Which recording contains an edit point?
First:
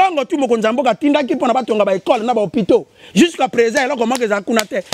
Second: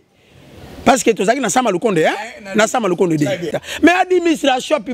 second; 1 cut; at 3.5 s

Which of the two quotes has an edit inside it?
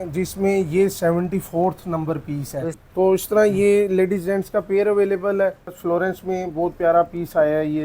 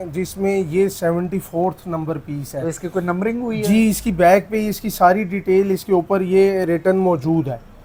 first; 2 cuts; at 2.8 s, 5.8 s

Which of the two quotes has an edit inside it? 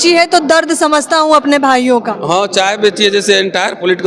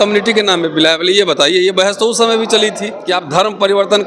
second; 1 cut; at 2.9 s

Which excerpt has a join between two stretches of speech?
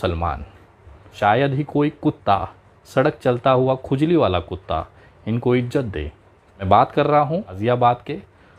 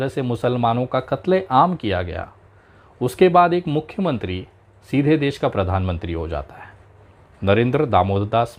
first; 3 cuts; at 1.1 s, 6.7 s, 7.6 s

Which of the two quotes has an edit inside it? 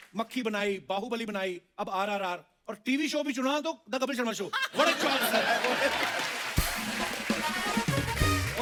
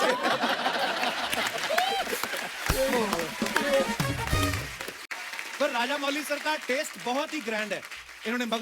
second; 1 cut; at 5.1 s

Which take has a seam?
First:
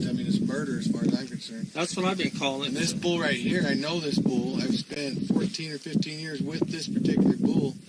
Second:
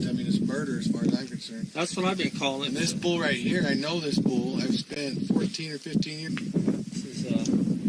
first; 1 cut; at 6.3 s

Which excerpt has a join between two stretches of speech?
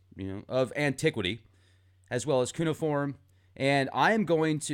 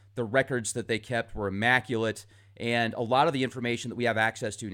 first; 1 cut; at 2.8 s

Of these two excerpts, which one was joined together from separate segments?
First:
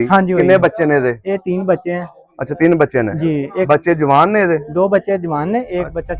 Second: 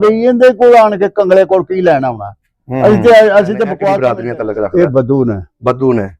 second; 1 cut; at 3.8 s

